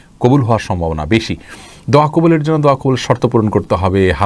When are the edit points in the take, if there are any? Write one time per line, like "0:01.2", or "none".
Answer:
none